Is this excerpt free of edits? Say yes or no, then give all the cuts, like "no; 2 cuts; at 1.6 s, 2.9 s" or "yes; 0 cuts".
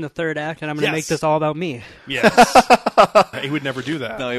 no; 1 cut; at 3.3 s